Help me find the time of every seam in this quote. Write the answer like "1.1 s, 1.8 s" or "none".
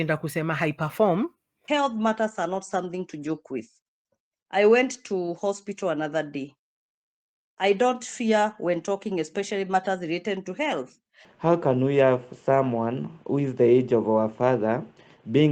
1.5 s, 11.2 s